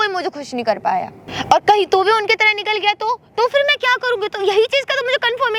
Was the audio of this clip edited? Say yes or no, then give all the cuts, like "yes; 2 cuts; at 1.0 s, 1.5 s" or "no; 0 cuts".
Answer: no; 0 cuts